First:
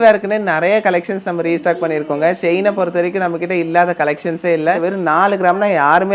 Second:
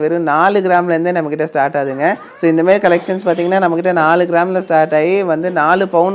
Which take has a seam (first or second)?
first